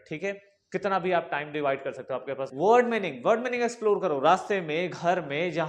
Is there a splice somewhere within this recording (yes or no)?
yes